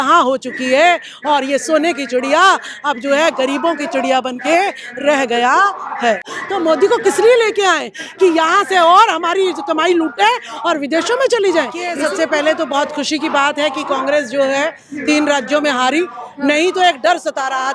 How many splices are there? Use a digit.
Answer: 2